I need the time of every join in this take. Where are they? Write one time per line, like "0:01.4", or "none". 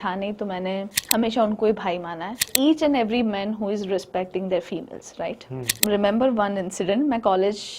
0:01.0
0:02.5
0:05.8